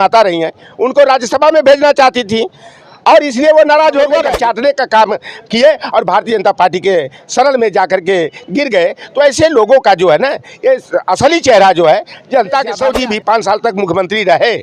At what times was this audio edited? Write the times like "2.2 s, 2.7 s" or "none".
4.2 s, 12.8 s